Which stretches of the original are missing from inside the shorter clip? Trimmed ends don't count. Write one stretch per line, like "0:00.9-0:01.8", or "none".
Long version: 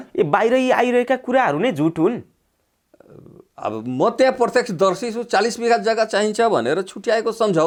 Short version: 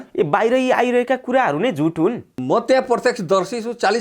0:02.3-0:03.8